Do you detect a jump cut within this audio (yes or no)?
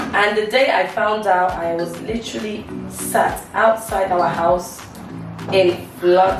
no